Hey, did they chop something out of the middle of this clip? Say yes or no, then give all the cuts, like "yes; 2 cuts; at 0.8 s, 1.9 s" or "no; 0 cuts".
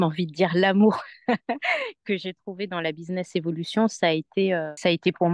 no; 0 cuts